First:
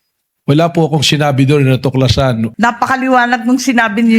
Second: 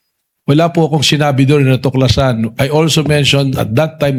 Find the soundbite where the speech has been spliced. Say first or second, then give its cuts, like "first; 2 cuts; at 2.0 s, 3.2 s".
first; 1 cut; at 2.5 s